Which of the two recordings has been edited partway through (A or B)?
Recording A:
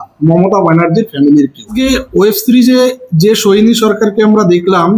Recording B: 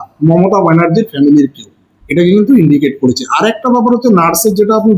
A